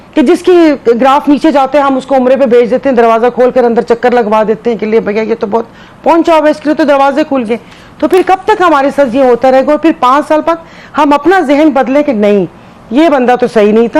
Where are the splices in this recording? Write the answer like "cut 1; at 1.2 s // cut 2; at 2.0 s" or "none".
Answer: none